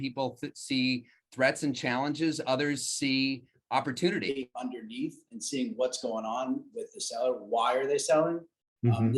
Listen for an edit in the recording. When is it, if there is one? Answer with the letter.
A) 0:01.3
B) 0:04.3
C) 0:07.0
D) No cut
B